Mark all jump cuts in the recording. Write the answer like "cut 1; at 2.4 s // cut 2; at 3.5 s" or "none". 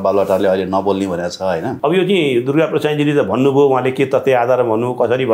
cut 1; at 1.8 s